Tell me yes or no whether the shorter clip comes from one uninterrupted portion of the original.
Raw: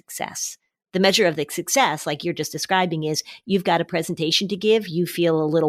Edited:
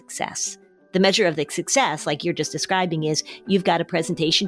yes